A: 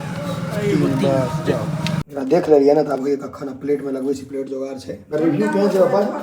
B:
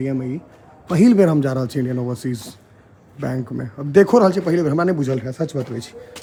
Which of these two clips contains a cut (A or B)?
A